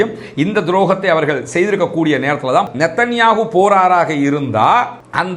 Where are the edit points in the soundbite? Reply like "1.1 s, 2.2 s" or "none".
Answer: 2.7 s